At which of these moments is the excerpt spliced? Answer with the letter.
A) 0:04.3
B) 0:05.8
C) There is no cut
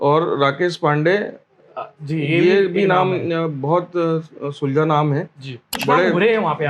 B